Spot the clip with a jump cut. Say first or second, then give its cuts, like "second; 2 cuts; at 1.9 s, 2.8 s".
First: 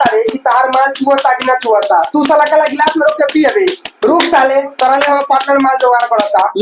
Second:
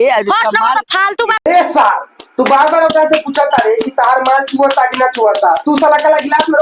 second; 1 cut; at 1.4 s